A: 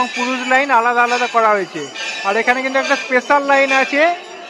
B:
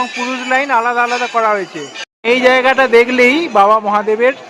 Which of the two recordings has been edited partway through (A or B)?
B